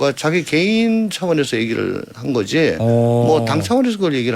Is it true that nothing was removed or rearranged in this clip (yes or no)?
yes